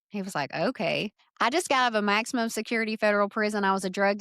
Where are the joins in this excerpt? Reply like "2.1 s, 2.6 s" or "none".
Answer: 1.2 s